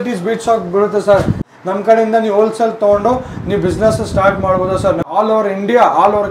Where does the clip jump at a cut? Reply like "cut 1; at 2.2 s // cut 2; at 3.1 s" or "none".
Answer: cut 1; at 1.5 s // cut 2; at 5.1 s